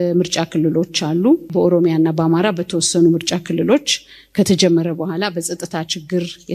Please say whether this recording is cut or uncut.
cut